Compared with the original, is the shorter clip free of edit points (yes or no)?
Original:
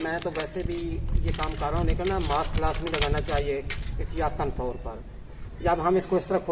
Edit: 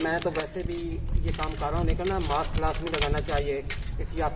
yes